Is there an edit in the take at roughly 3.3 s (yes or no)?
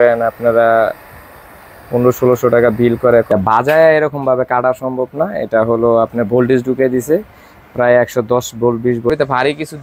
yes